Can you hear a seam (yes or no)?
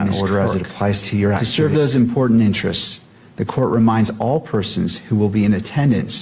yes